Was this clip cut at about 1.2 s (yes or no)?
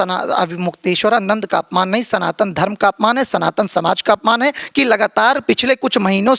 no